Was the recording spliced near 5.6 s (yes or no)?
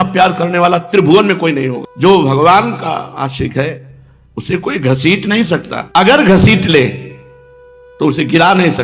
no